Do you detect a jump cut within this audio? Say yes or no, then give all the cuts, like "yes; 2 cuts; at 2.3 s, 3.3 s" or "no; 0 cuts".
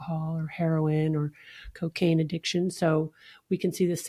no; 0 cuts